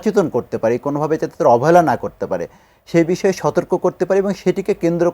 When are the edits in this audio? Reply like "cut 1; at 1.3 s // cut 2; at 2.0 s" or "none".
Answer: none